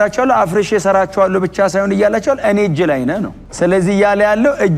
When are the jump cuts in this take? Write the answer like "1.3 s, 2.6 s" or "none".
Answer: 3.5 s